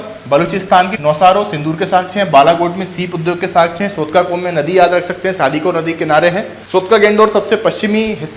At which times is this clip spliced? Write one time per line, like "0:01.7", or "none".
0:00.9
0:06.5